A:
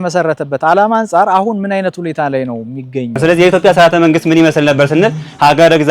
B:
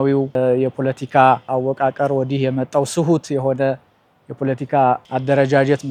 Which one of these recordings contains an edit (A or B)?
A